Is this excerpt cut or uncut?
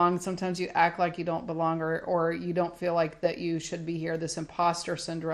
uncut